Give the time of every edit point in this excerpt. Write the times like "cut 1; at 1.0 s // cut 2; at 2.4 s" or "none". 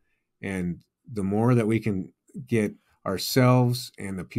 none